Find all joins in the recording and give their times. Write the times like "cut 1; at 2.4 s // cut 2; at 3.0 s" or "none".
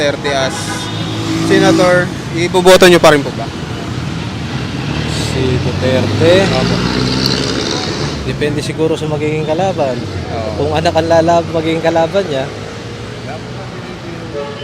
none